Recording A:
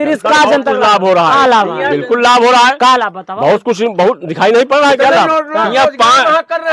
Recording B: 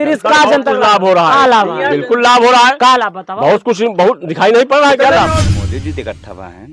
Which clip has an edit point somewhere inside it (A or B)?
B